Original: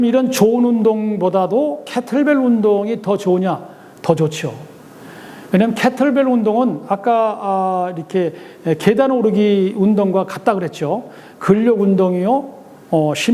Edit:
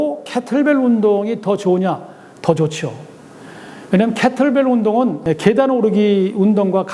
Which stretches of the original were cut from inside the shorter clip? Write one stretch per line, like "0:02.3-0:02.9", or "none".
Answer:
0:06.8-0:08.6

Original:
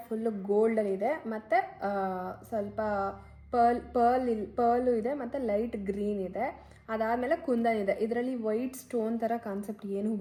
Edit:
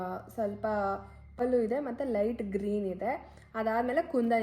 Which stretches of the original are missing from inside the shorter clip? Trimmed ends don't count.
0:03.5-0:04.7

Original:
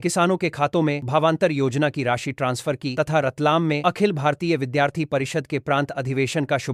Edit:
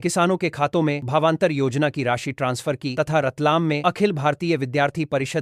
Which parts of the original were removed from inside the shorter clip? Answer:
none

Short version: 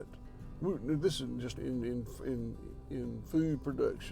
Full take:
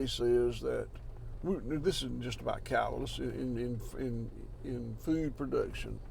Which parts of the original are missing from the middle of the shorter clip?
0:02.4-0:03.3

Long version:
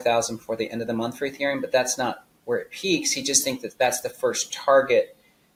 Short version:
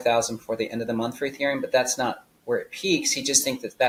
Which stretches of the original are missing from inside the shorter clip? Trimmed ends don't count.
none

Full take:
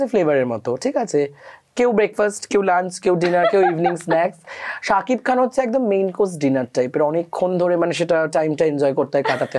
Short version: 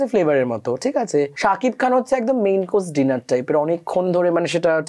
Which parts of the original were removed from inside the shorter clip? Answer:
0:01.3-0:04.8

